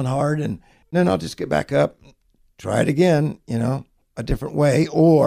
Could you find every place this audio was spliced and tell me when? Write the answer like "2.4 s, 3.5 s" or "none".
0.9 s